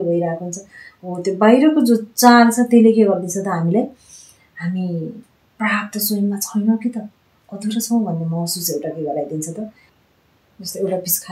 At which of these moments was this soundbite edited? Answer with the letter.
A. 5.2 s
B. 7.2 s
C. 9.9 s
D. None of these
C